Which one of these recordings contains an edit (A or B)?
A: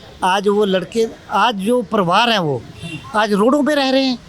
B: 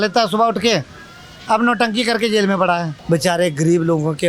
B